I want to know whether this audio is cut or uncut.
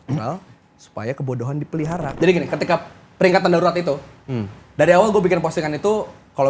cut